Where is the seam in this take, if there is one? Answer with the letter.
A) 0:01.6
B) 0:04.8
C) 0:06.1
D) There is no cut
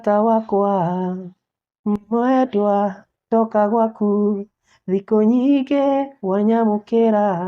D